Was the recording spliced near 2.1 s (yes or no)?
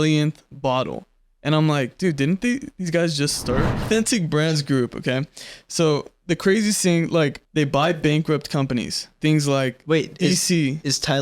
no